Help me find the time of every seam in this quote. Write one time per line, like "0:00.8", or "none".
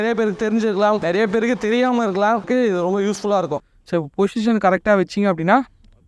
0:01.0
0:02.4
0:03.6